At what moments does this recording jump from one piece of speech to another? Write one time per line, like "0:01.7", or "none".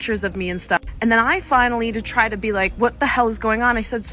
0:00.9